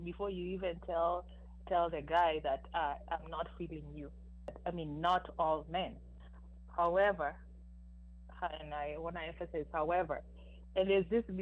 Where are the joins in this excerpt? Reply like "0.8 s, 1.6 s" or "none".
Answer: 4.6 s